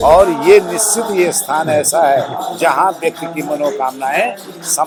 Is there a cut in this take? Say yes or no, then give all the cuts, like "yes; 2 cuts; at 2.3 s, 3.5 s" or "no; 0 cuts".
no; 0 cuts